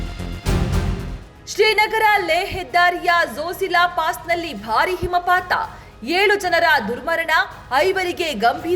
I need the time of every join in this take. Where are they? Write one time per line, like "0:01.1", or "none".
0:01.4